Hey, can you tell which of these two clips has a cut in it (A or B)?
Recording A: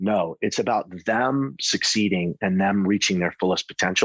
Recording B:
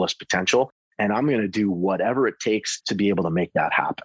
B